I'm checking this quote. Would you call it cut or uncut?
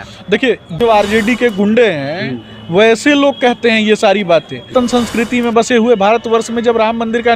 cut